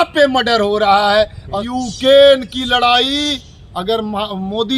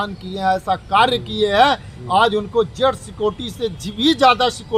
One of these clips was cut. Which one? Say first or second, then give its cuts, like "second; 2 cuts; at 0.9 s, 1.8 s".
first; 1 cut; at 1.6 s